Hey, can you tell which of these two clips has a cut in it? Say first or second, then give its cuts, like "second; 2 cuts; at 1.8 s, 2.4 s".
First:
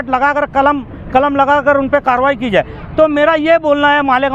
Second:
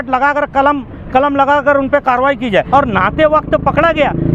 second; 1 cut; at 2.7 s